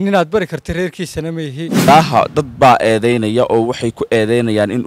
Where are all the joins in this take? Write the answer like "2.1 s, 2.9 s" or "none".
1.9 s